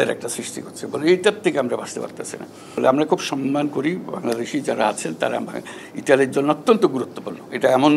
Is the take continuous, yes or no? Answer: no